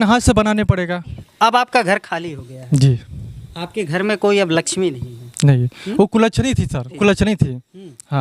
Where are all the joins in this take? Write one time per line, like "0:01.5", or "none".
0:01.2
0:06.9